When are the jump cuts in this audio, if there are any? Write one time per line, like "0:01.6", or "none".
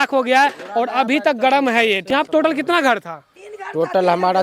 0:02.0